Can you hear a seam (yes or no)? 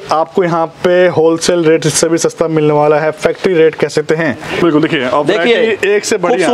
yes